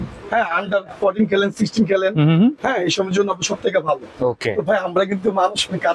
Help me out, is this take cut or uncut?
uncut